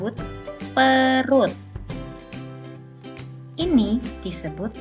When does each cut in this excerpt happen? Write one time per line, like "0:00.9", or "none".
none